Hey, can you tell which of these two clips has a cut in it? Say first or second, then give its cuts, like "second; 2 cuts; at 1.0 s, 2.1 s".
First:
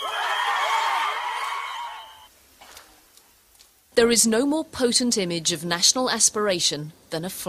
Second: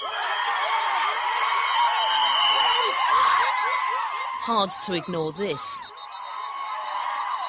first; 1 cut; at 2.0 s